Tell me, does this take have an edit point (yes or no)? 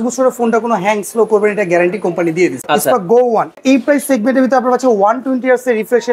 yes